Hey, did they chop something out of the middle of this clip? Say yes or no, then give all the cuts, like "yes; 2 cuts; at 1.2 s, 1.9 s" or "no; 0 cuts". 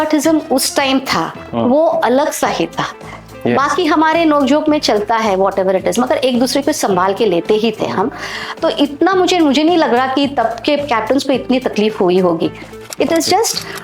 yes; 1 cut; at 1.4 s